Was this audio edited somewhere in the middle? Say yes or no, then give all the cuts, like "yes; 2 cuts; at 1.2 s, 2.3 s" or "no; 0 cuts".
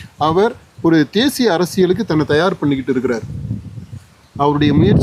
no; 0 cuts